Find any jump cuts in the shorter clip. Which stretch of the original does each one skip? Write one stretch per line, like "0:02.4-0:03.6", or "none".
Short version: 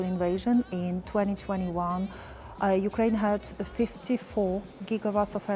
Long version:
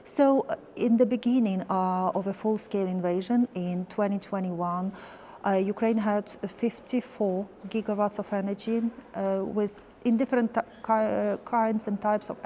none